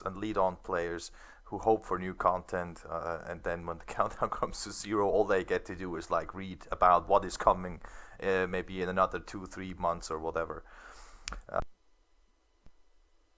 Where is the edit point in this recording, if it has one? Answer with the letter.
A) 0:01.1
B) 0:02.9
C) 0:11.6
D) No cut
D